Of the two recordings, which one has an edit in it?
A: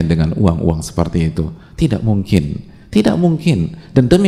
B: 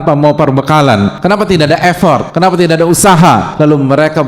B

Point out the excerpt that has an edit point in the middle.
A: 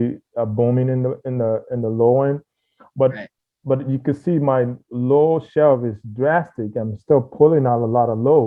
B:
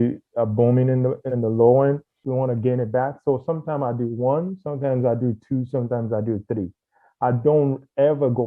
B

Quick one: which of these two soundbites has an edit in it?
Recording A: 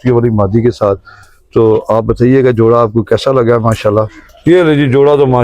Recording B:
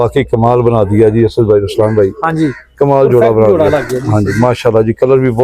A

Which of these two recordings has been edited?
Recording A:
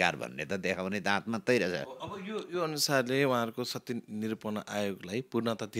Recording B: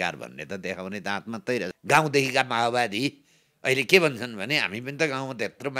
B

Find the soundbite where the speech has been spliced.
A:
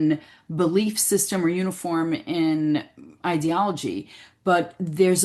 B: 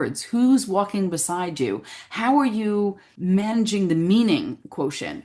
B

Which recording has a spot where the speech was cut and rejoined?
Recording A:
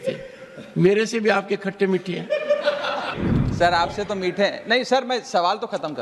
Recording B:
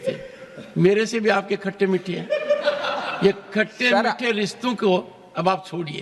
A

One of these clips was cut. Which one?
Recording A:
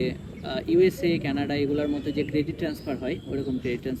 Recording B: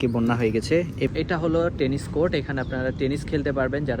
B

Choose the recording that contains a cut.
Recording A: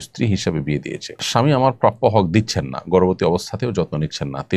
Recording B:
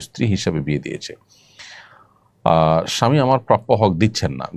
A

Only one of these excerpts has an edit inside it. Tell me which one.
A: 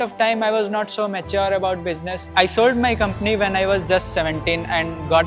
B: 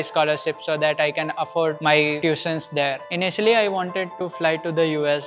B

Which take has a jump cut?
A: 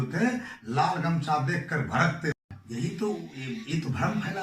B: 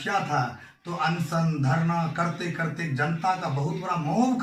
A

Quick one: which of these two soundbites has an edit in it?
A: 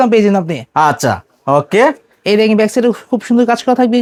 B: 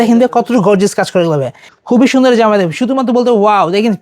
B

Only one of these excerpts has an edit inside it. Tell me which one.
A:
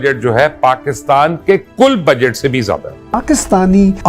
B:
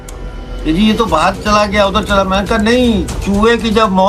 A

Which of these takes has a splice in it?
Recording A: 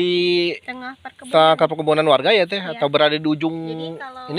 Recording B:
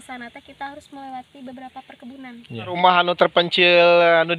B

